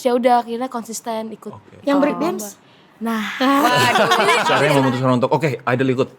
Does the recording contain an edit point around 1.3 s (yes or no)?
no